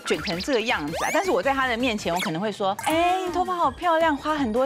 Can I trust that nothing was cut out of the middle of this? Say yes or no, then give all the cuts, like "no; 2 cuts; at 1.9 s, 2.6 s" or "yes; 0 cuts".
no; 1 cut; at 2.8 s